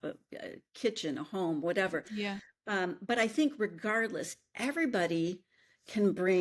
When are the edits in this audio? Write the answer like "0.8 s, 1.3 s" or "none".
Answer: none